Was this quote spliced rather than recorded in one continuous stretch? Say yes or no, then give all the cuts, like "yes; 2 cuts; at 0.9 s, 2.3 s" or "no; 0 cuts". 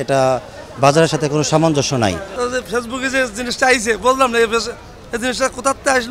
yes; 1 cut; at 2.2 s